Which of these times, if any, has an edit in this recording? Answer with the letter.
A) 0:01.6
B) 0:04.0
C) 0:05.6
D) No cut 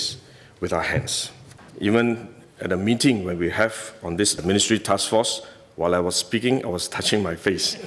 A